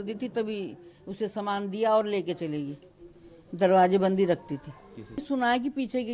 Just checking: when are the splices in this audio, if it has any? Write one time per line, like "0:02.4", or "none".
0:05.2